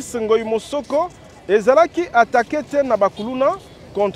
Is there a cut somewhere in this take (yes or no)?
no